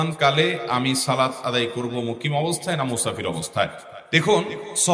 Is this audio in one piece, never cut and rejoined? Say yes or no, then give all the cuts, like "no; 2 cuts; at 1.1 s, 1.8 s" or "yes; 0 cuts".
yes; 0 cuts